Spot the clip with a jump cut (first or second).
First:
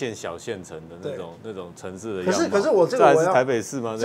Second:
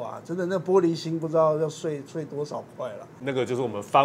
second